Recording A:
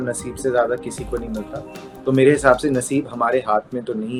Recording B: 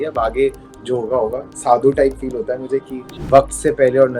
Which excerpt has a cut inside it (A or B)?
B